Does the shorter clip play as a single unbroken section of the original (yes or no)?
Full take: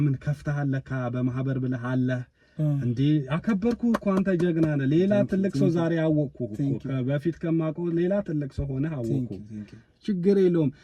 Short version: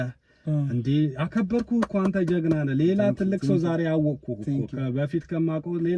yes